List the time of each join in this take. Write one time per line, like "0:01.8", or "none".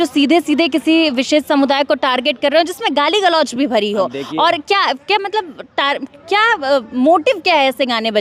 none